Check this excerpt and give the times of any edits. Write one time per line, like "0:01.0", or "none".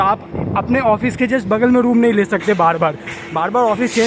none